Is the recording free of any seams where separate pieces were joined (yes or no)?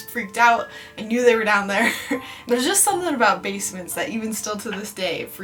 yes